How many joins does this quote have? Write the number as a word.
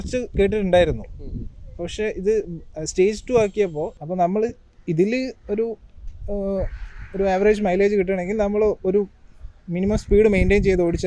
one